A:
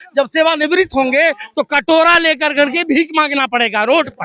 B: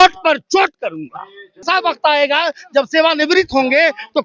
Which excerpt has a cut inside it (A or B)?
B